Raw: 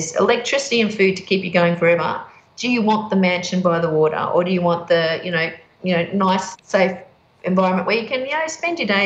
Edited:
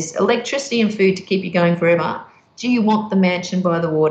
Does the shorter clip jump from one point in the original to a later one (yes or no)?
no